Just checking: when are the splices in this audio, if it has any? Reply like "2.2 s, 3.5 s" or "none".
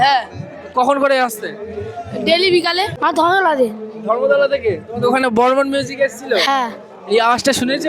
2.9 s